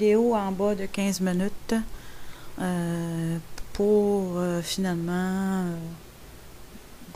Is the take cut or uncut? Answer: uncut